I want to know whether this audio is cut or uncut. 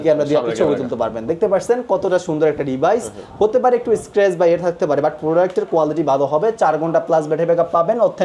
uncut